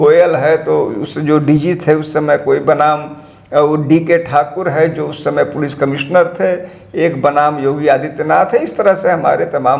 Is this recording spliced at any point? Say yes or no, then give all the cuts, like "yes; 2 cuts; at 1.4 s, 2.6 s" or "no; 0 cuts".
no; 0 cuts